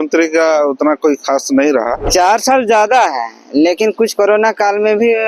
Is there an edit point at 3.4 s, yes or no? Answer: no